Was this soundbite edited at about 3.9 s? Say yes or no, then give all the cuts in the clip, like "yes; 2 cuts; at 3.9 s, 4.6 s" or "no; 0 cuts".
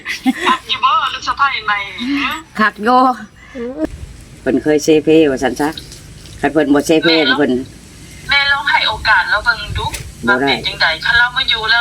yes; 1 cut; at 3.9 s